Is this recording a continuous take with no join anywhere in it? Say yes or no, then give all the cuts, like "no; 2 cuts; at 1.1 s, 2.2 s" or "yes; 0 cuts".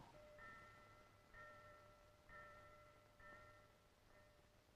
no; 1 cut; at 2.7 s